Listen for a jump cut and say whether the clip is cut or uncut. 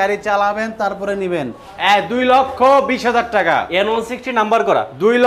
cut